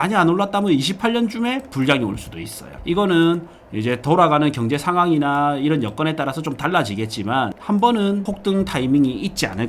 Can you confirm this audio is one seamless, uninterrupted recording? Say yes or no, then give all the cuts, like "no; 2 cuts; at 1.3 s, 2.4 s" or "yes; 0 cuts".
no; 2 cuts; at 7.6 s, 8.3 s